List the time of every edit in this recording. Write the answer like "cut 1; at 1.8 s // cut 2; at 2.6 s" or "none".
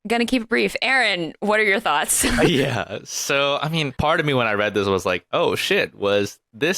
cut 1; at 3.9 s